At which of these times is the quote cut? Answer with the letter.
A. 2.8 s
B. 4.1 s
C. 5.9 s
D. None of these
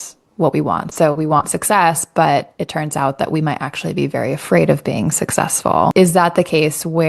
C